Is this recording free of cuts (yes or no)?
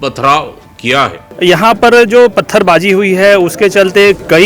no